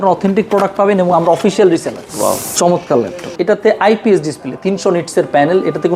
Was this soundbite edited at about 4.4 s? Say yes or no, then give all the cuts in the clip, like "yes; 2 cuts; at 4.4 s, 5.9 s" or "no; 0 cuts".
no; 2 cuts; at 2.0 s, 3.2 s